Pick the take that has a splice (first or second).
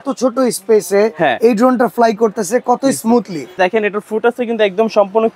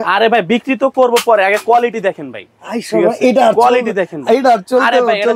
first